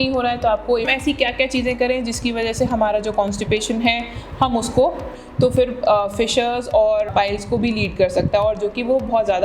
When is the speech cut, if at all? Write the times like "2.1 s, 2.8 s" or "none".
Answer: 0.9 s, 5.2 s, 7.1 s